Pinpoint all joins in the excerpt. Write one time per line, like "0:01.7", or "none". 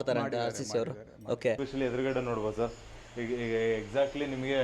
0:01.6